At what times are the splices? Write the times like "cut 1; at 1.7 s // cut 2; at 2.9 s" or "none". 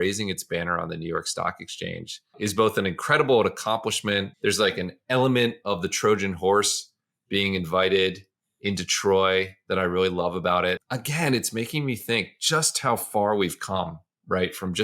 cut 1; at 2.3 s // cut 2; at 4.3 s // cut 3; at 10.9 s